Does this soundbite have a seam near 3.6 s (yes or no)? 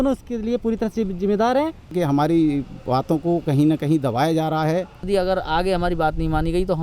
no